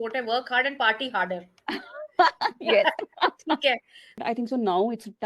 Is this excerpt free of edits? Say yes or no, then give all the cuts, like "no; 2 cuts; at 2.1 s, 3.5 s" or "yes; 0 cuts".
no; 1 cut; at 4.2 s